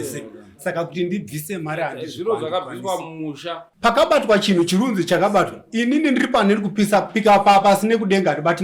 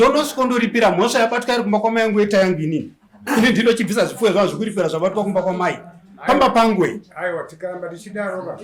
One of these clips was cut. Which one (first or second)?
first